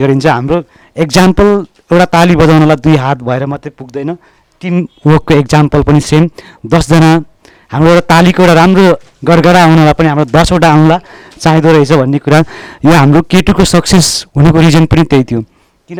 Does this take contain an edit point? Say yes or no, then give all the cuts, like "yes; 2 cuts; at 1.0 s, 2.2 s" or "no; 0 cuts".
no; 0 cuts